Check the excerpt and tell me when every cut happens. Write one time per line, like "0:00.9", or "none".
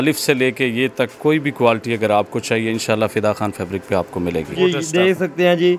0:04.5